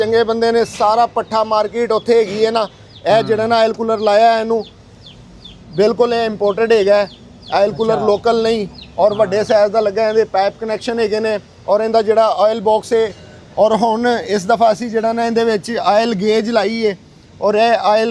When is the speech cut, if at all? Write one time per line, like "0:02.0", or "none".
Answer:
none